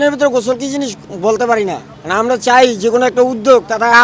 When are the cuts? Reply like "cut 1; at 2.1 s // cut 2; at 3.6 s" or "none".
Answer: none